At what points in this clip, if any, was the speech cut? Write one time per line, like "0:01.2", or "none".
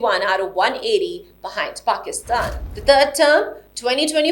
0:02.6